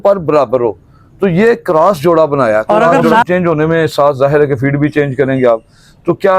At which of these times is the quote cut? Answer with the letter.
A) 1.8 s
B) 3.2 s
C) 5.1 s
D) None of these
B